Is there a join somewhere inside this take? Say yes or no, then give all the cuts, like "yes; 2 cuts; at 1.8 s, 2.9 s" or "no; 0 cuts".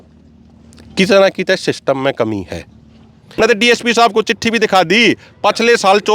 yes; 1 cut; at 3.0 s